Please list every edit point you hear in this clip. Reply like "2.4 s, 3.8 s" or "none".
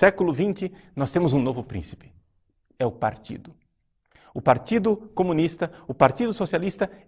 none